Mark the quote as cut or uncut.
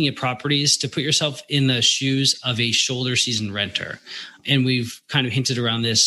cut